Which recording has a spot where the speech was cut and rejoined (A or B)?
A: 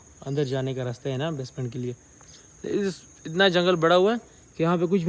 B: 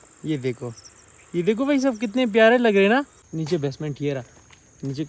B